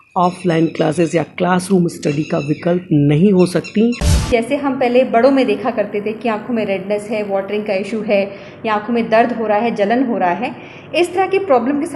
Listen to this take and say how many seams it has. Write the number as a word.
one